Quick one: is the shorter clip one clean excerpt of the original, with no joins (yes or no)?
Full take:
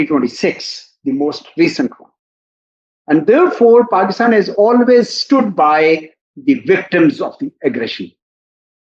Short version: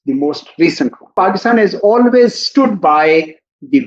no